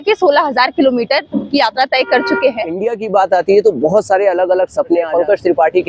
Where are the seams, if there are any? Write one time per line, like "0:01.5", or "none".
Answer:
0:02.9
0:05.1